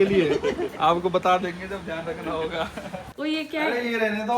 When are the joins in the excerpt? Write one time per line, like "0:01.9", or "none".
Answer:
0:03.0